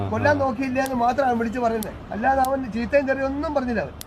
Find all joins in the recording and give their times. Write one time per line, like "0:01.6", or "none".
0:02.0